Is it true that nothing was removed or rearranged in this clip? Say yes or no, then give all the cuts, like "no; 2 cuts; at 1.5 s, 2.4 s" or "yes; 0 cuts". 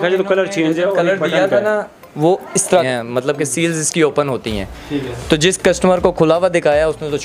no; 1 cut; at 2.9 s